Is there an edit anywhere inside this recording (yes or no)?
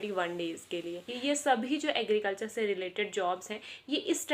yes